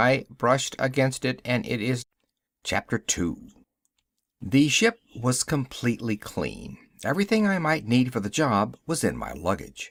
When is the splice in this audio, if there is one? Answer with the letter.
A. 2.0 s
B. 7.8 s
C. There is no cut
C